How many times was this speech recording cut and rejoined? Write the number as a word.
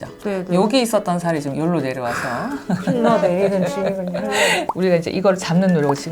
one